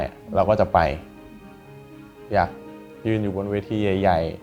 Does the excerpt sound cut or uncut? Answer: uncut